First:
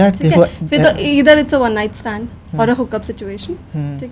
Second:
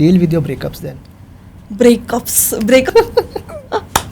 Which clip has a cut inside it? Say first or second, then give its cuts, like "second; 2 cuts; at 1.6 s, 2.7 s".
second; 1 cut; at 2.9 s